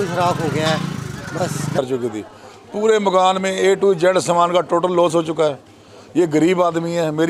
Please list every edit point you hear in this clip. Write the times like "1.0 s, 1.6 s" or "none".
1.8 s